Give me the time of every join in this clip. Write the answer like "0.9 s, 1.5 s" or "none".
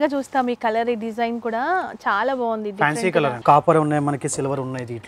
3.4 s